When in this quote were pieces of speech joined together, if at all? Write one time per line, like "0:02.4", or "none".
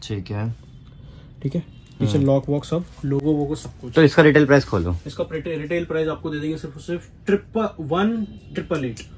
none